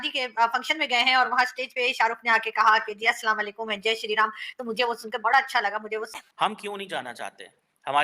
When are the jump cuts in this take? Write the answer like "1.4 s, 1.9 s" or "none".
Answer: 6.2 s